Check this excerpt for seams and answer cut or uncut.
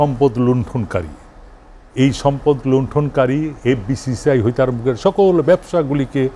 uncut